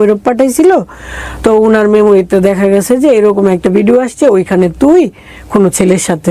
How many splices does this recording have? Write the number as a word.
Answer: zero